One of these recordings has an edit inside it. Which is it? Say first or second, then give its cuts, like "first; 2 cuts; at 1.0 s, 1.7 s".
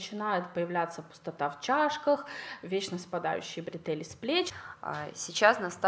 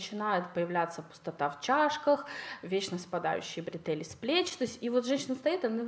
first; 1 cut; at 4.5 s